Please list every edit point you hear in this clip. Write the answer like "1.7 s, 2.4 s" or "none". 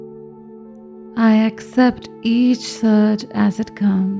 1.1 s